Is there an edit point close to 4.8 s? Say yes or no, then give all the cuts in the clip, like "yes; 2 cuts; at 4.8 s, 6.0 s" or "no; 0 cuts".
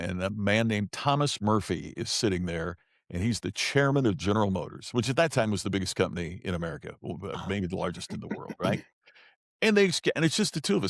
no; 0 cuts